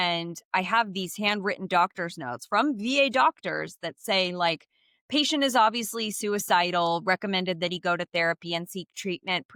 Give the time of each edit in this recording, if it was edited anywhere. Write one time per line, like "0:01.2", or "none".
none